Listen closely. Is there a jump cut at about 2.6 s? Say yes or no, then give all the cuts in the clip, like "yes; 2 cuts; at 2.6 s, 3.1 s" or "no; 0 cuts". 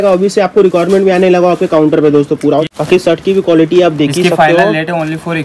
yes; 1 cut; at 2.6 s